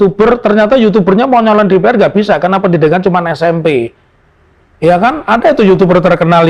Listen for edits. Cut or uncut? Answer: uncut